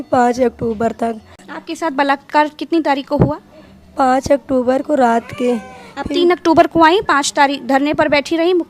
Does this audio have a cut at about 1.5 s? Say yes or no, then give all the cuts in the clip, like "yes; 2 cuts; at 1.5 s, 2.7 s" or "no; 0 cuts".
yes; 1 cut; at 1.5 s